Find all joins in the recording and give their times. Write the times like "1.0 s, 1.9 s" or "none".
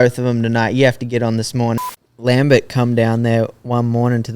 1.8 s

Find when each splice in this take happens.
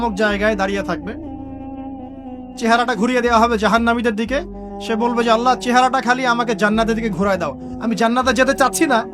1.0 s, 2.6 s

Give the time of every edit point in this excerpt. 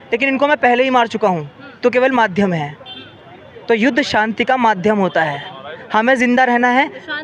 none

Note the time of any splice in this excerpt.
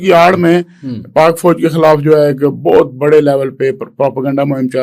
none

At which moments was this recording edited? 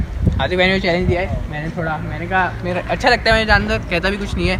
none

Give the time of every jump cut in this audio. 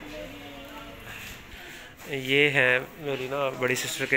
none

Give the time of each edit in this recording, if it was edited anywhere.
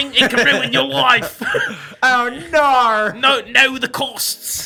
none

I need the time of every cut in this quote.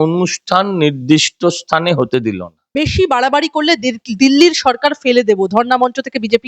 2.6 s

